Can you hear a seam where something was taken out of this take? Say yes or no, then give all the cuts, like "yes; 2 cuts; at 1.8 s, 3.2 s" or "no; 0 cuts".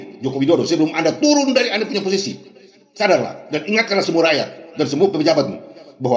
no; 0 cuts